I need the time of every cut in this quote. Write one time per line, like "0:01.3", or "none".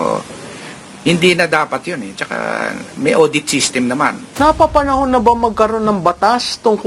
0:04.2